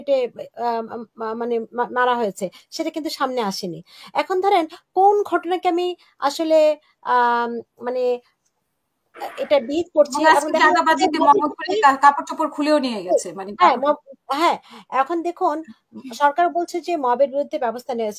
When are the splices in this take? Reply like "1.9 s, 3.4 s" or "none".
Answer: none